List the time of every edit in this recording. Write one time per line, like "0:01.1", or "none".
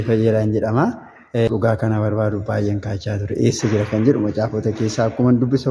0:01.5